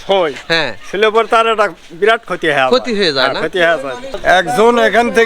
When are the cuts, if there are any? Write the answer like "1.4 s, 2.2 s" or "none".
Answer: 4.1 s